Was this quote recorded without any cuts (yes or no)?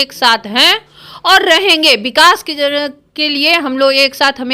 yes